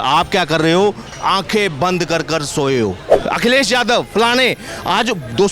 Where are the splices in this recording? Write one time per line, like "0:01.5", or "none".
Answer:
0:03.1